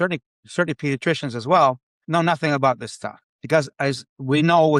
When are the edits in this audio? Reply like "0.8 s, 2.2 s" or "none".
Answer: 1.9 s